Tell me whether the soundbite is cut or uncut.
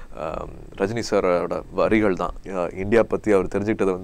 cut